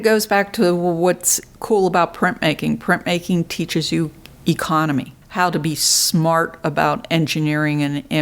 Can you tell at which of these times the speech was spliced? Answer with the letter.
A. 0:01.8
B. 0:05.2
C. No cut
B